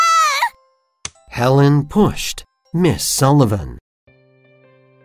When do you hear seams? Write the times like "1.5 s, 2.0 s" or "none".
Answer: 3.8 s